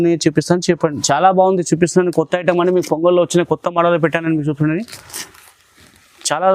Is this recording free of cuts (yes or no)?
no